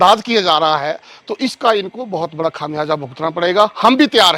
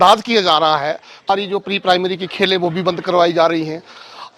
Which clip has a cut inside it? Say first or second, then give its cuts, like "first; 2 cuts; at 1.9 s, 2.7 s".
second; 1 cut; at 1.3 s